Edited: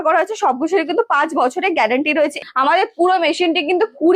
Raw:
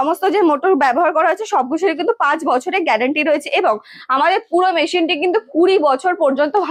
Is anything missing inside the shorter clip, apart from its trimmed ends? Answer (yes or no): yes